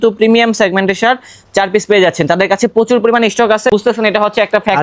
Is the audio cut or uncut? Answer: cut